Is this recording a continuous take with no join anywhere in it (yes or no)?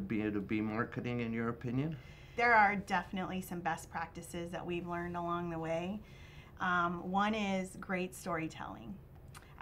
no